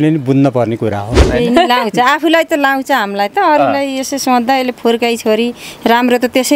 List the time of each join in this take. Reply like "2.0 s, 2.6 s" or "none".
1.2 s